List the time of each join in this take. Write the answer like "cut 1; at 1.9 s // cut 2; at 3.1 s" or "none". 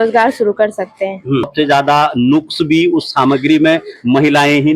cut 1; at 1.5 s